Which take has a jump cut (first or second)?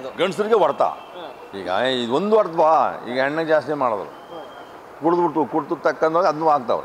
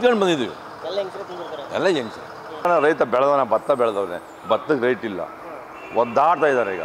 second